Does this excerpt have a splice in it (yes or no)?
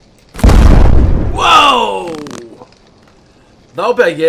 no